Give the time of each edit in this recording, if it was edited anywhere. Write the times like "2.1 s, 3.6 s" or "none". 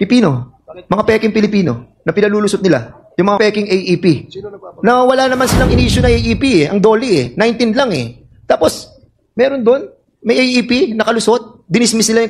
none